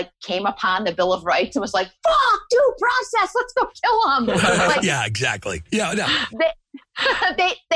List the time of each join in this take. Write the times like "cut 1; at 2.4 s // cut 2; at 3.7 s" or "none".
none

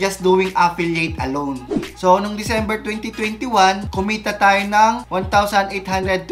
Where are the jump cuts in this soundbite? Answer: cut 1; at 1.6 s

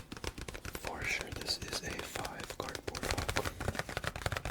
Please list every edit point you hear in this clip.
cut 1; at 3.5 s

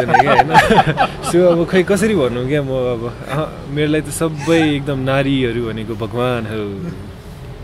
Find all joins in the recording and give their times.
none

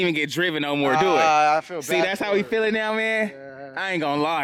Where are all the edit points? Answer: none

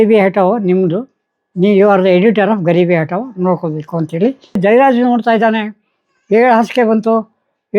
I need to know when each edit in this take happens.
cut 1; at 4.6 s

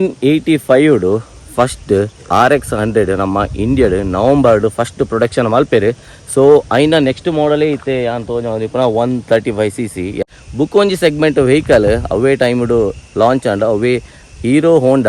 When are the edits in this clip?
cut 1; at 10.3 s

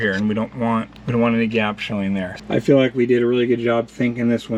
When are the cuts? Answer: cut 1; at 1.0 s // cut 2; at 2.4 s

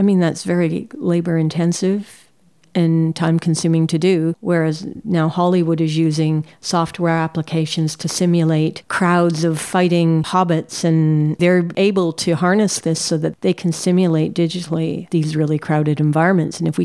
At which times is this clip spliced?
none

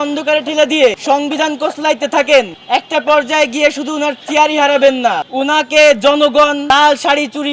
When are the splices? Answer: cut 1; at 1.0 s // cut 2; at 2.6 s // cut 3; at 5.3 s // cut 4; at 6.6 s

